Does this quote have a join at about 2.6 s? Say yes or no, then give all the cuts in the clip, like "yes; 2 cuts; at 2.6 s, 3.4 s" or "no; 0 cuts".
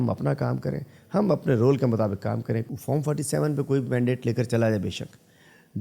yes; 1 cut; at 2.6 s